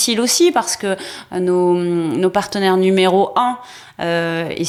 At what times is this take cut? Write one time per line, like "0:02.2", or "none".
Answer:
none